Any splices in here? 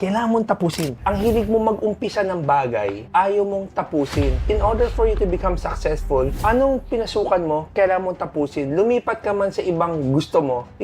yes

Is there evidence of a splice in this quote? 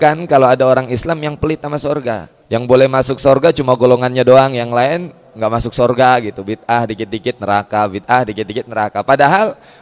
yes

